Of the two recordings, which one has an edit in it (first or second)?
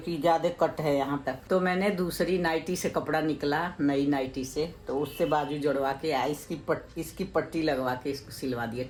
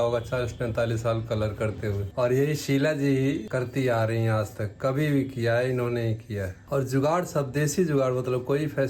second